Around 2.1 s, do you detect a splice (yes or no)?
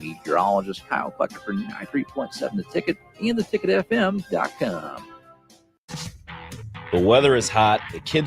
no